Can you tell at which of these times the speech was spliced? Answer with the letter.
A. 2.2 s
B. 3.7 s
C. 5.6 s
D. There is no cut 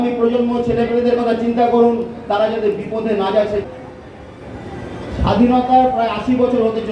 B